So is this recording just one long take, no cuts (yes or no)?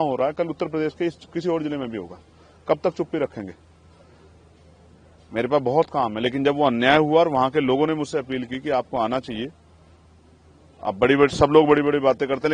yes